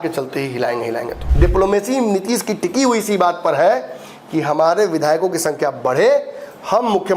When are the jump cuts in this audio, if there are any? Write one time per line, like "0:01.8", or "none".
0:01.2